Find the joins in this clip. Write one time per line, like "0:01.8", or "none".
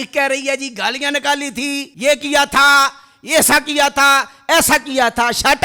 0:01.9